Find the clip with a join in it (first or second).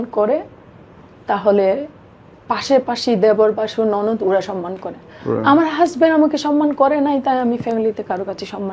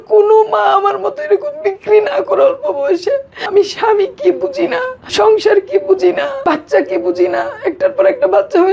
second